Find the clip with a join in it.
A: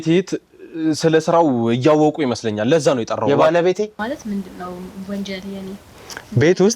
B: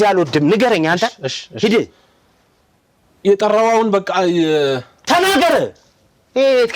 A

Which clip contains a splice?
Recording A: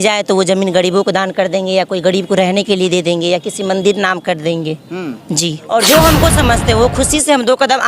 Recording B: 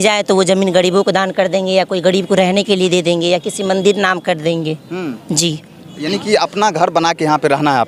A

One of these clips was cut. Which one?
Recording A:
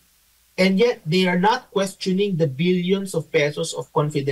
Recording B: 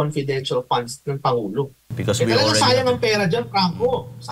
B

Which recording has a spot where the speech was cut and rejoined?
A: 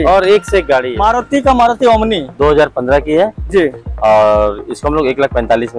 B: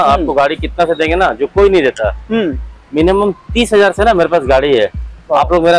A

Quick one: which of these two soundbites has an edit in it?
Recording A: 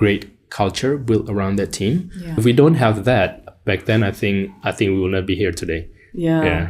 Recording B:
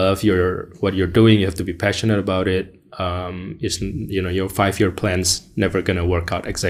A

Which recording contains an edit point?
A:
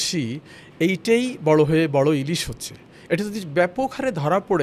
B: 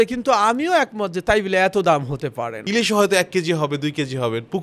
B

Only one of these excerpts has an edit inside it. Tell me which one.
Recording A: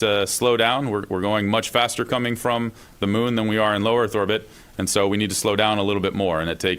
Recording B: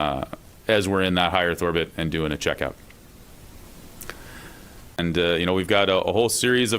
B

